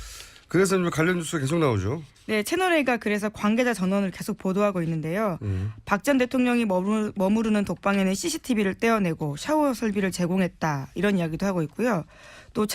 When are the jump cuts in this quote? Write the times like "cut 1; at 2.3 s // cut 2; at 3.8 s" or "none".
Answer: cut 1; at 6.5 s

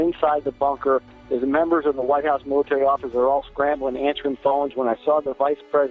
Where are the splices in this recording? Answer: none

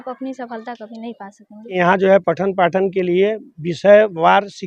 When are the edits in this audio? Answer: cut 1; at 1.7 s

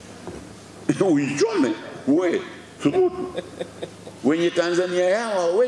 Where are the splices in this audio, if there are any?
none

